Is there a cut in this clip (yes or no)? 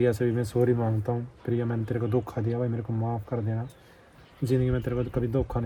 no